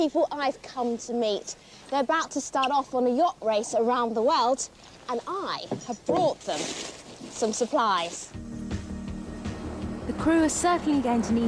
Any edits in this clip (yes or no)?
no